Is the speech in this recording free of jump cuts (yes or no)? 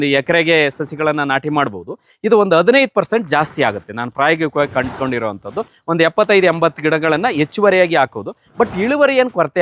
yes